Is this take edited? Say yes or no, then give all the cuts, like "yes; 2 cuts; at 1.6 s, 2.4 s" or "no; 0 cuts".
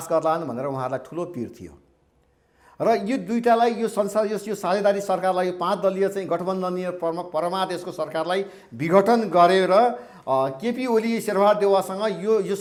no; 0 cuts